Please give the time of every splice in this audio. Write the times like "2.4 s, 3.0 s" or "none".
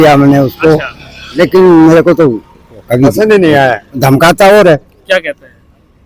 none